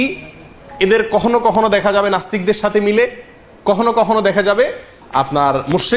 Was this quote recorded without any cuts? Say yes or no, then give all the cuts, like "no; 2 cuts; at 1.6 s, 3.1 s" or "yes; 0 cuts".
yes; 0 cuts